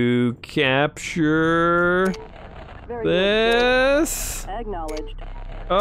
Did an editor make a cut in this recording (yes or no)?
yes